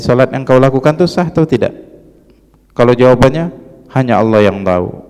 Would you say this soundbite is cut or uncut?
uncut